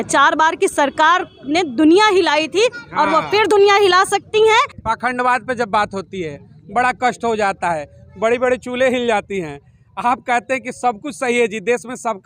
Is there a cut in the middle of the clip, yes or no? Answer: yes